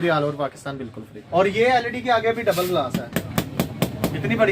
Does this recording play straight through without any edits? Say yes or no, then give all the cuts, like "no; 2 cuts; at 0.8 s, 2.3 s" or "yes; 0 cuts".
no; 1 cut; at 1.1 s